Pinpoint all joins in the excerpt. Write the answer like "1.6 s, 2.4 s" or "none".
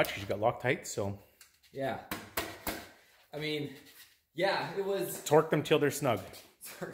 none